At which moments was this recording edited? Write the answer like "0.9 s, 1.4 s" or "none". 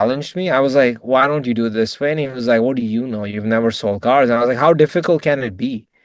none